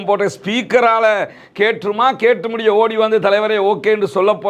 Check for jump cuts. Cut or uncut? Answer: uncut